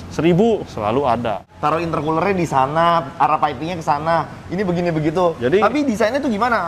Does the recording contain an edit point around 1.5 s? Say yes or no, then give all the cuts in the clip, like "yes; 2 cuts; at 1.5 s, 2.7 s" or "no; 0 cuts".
yes; 2 cuts; at 1.5 s, 5.4 s